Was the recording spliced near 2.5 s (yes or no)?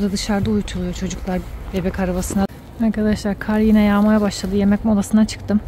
yes